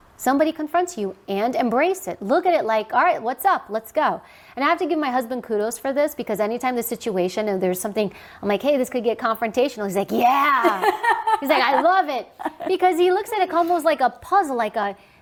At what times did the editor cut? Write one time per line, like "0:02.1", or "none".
none